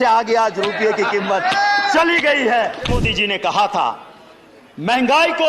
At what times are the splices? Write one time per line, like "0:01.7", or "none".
0:02.9